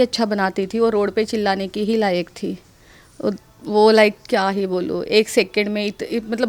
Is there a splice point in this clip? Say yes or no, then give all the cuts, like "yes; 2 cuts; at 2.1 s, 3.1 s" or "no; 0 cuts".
no; 0 cuts